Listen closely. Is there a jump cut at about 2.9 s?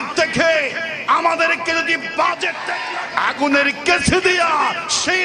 yes; 1 cut; at 2.9 s

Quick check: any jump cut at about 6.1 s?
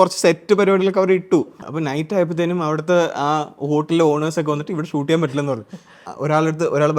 yes; 2 cuts; at 1.6 s, 6.1 s

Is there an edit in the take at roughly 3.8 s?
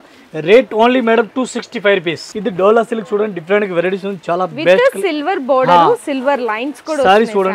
no; 1 cut; at 2.2 s

